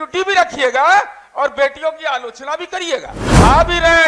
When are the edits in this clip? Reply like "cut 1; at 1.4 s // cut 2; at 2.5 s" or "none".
cut 1; at 3.2 s